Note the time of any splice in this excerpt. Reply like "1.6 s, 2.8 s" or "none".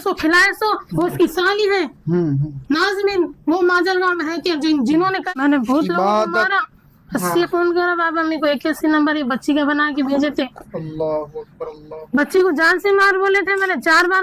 5.3 s